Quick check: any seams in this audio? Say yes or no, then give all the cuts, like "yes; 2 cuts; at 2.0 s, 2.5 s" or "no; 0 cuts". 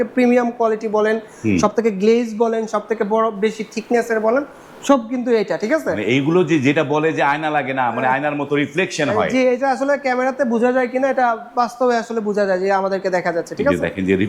no; 0 cuts